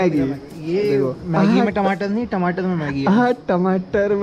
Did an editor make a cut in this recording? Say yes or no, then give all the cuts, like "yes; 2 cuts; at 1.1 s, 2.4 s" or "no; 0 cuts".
no; 0 cuts